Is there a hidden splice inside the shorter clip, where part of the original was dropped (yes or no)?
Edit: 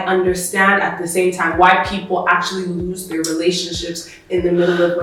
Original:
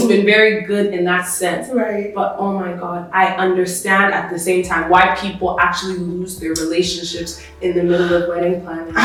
no